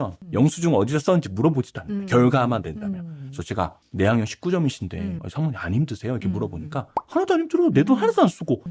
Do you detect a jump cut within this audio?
no; 0 cuts

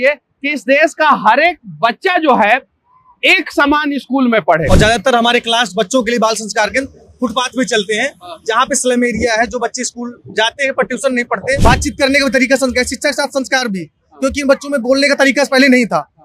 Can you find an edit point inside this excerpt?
yes; 2 cuts; at 4.6 s, 11.6 s

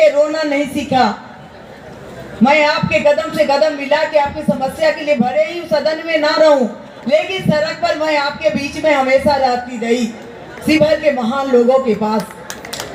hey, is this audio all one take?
yes; 0 cuts

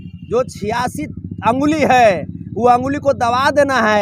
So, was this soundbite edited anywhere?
no; 0 cuts

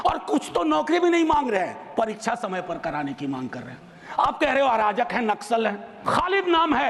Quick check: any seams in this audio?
yes; 1 cut; at 5.9 s

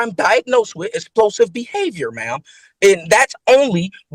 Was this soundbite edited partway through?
no; 0 cuts

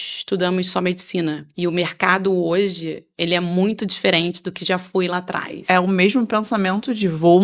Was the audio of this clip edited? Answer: yes; 2 cuts; at 1.5 s, 5.6 s

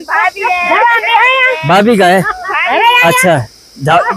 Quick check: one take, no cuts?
yes; 0 cuts

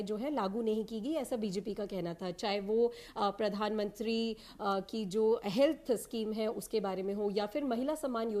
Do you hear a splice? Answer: no; 0 cuts

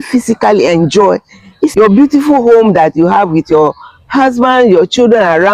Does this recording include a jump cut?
yes; 1 cut; at 1.7 s

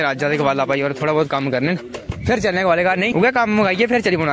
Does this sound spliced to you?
no; 0 cuts

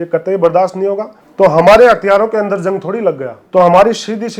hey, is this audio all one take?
no; 2 cuts; at 1.2 s, 3.3 s

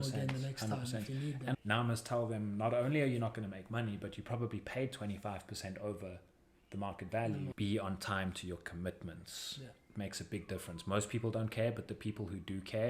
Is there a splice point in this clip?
yes; 2 cuts; at 1.6 s, 7.5 s

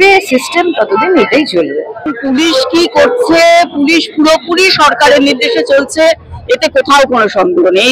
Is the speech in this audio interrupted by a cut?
yes; 1 cut; at 2.1 s

